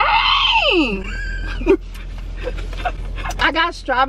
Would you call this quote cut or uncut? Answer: uncut